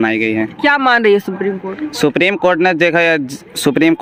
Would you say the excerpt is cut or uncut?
uncut